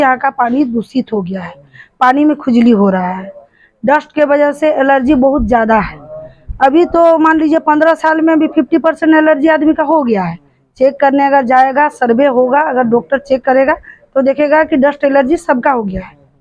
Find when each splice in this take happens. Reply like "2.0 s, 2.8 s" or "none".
none